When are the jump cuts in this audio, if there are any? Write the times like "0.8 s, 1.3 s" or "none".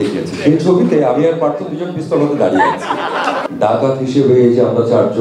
3.4 s